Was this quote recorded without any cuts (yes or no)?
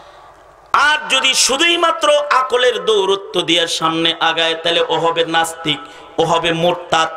yes